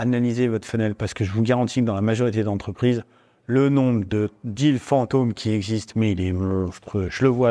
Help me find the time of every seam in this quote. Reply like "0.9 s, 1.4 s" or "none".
none